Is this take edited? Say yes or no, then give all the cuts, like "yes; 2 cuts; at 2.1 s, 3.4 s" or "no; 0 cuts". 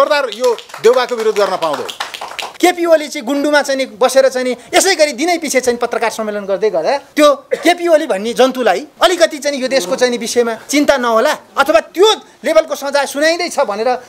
yes; 4 cuts; at 2.4 s, 7.1 s, 8.9 s, 10.6 s